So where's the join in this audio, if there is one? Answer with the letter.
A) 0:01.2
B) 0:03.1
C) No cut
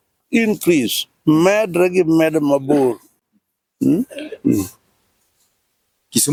C